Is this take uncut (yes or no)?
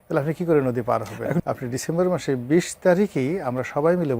no